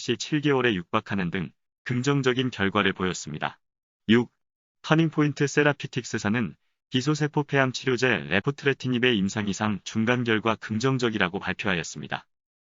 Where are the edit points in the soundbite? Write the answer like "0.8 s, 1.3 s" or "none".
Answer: none